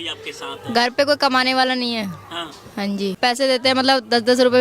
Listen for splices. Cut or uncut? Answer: cut